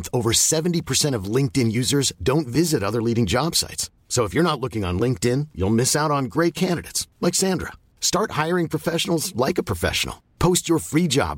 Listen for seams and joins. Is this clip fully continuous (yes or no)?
yes